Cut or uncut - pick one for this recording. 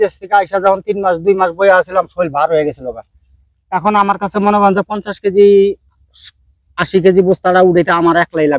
uncut